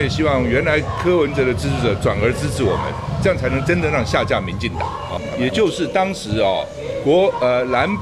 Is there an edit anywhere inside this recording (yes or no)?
yes